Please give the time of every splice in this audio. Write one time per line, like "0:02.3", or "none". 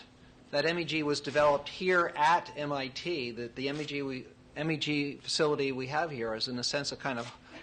0:04.9